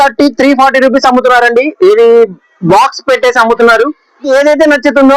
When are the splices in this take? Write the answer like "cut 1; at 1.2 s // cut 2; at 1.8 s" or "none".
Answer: cut 1; at 4.3 s